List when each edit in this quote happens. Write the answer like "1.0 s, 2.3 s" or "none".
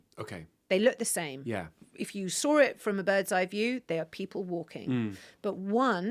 1.8 s

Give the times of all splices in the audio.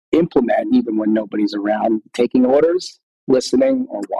none

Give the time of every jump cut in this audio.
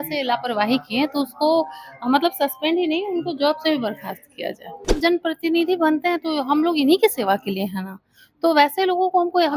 5.0 s

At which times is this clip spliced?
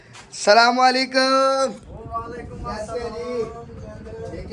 none

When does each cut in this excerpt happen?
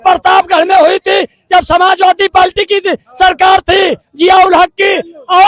none

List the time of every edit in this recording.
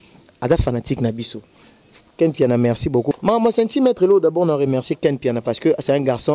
3.2 s

